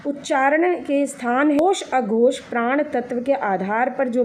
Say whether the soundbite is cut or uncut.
cut